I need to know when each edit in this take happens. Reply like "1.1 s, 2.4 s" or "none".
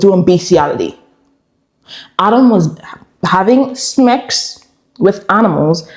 none